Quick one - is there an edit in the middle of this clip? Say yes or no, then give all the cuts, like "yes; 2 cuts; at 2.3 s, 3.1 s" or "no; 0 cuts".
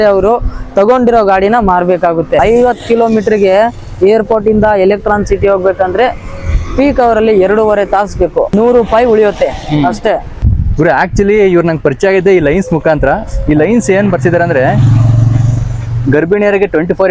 yes; 3 cuts; at 2.4 s, 8.5 s, 10.4 s